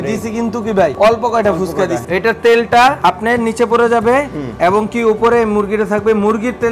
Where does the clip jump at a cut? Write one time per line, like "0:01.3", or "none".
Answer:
0:00.9
0:02.0
0:03.0